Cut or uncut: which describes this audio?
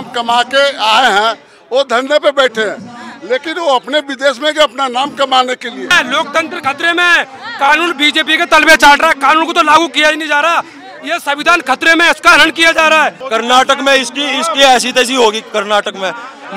cut